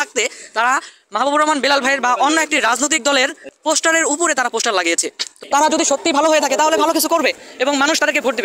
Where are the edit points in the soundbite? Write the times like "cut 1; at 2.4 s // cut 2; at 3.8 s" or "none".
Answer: cut 1; at 5.4 s